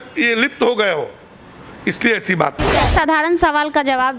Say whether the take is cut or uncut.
cut